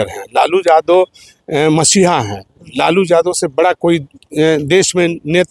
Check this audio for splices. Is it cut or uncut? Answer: uncut